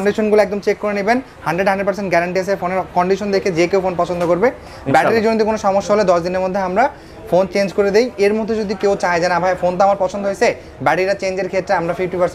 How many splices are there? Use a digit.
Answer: 0